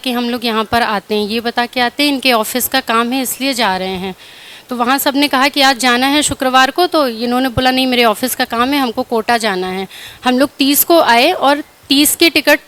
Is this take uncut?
yes; 0 cuts

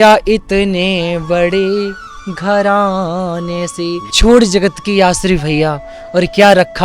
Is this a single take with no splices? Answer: no; 1 cut; at 4.1 s

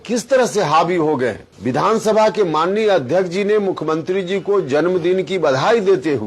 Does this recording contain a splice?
yes; 1 cut; at 1.5 s

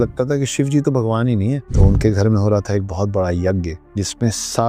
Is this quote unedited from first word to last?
no; 2 cuts; at 1.7 s, 3.8 s

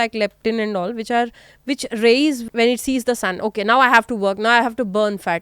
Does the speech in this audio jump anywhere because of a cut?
yes; 1 cut; at 2.4 s

